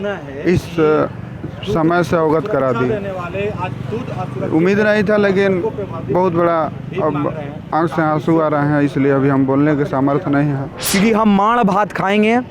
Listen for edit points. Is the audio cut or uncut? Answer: cut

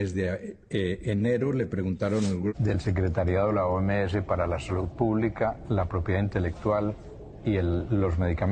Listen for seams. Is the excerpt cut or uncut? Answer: cut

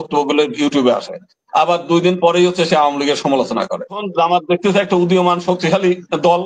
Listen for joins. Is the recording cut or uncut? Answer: cut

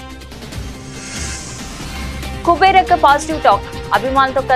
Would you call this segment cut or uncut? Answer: uncut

